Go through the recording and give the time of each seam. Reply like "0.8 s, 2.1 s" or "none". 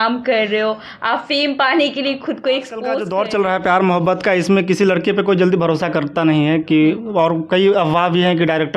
3.0 s